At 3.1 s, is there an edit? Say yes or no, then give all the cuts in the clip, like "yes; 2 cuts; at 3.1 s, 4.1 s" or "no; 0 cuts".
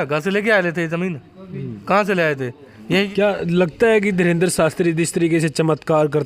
yes; 1 cut; at 3.1 s